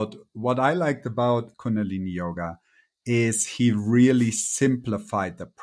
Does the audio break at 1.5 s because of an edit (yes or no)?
yes